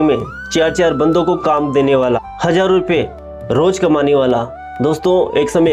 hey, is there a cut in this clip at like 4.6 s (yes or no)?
no